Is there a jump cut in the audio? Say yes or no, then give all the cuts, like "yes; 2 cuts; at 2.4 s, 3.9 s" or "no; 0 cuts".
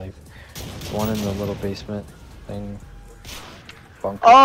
no; 0 cuts